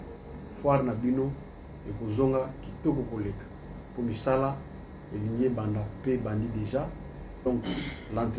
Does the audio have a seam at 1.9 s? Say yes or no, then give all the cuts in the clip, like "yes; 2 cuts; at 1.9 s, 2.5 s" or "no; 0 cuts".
no; 1 cut; at 7.3 s